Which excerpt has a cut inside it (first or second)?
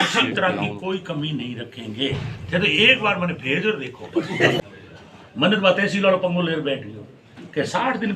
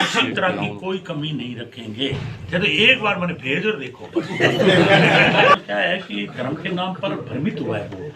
first